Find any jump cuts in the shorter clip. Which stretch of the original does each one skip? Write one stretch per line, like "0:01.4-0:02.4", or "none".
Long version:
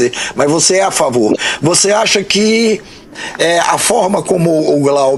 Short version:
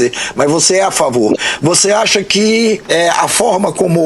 0:02.8-0:03.3